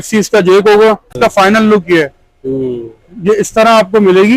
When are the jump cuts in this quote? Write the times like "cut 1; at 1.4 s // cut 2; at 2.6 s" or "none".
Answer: cut 1; at 1.2 s